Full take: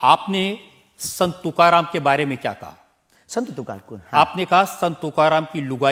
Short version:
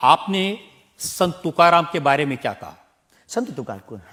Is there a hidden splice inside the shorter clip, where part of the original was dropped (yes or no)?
no